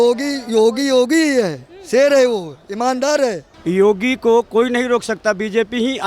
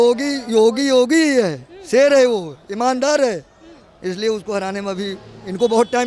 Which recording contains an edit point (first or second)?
first